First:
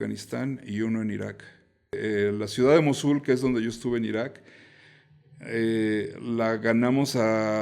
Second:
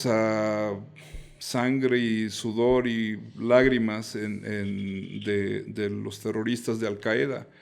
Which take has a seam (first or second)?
first